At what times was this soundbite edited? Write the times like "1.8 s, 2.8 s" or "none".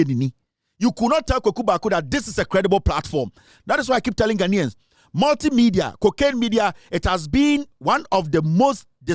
none